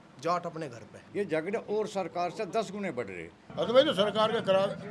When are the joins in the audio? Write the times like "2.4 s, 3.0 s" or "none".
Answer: 1.0 s, 3.4 s